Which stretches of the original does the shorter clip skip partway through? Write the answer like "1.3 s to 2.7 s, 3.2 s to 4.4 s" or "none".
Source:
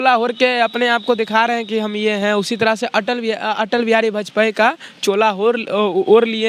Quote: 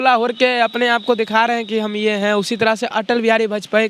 2.9 s to 3.5 s